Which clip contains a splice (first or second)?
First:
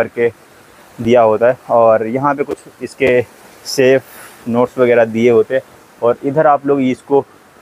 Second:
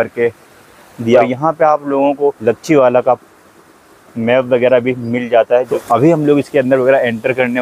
second